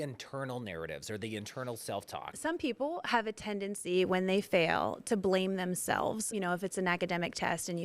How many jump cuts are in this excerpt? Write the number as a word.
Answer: two